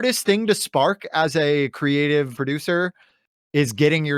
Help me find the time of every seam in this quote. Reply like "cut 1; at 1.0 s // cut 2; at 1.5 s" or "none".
cut 1; at 2.3 s

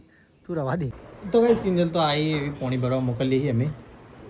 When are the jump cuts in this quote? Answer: cut 1; at 1.0 s

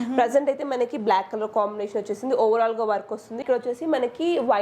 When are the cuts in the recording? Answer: cut 1; at 3.4 s

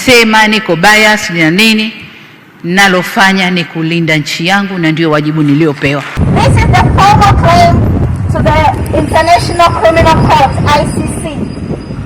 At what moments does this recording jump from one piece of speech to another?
cut 1; at 6.2 s

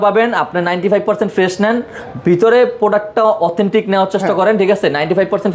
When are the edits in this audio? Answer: none

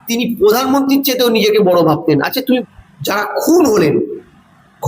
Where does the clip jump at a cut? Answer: cut 1; at 2.6 s

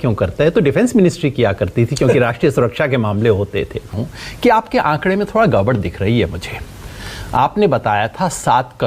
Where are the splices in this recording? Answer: cut 1; at 3.9 s

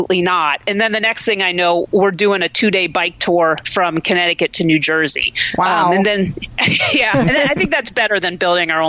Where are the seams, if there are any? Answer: none

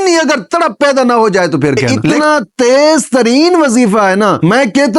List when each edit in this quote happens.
cut 1; at 2.0 s

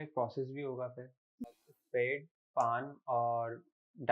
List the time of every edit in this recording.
cut 1; at 1.6 s

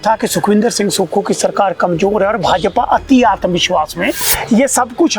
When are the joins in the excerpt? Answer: cut 1; at 4.2 s

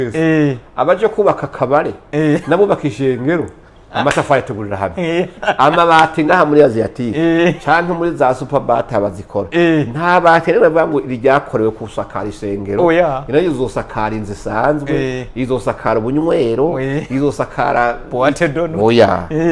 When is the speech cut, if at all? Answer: none

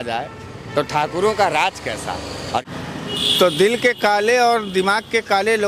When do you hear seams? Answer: cut 1; at 2.6 s

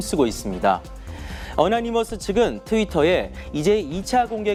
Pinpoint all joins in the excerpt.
none

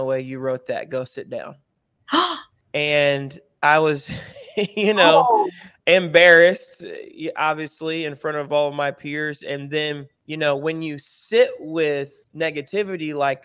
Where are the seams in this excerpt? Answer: cut 1; at 2.5 s // cut 2; at 10.2 s // cut 3; at 12.2 s

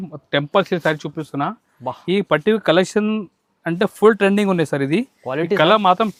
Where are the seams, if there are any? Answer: none

